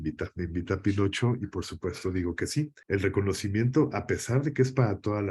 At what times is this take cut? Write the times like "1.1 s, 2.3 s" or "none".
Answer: 2.8 s